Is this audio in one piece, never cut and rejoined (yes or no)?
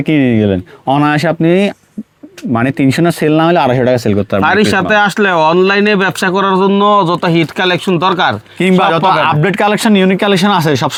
yes